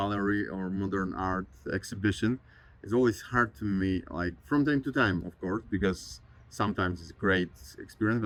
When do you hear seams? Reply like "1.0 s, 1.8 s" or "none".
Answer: none